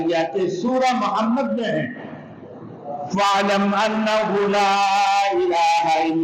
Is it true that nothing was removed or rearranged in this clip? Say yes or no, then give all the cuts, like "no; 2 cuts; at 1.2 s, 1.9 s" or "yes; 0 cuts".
yes; 0 cuts